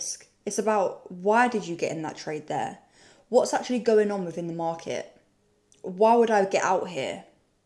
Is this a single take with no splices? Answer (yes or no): yes